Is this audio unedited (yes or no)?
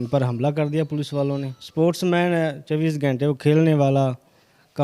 no